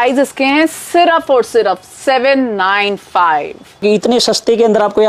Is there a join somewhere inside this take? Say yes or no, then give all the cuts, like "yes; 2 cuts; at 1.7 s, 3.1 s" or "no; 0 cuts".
yes; 1 cut; at 3.8 s